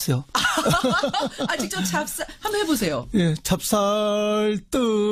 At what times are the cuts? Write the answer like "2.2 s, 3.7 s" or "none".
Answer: none